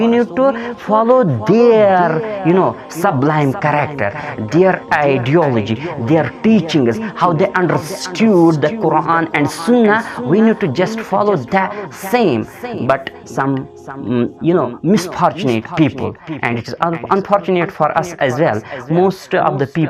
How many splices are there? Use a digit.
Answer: 0